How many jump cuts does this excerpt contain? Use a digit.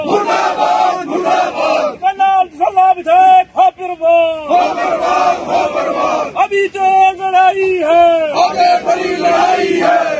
0